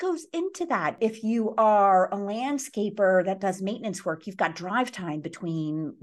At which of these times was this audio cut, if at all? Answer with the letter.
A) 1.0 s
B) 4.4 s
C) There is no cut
A